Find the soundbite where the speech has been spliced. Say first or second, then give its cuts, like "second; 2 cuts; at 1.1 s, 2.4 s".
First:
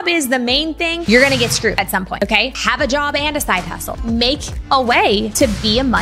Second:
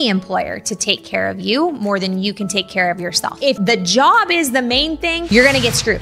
second; 1 cut; at 3.3 s